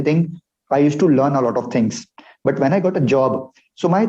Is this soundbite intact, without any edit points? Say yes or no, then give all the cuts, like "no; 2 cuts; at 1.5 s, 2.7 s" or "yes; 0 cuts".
yes; 0 cuts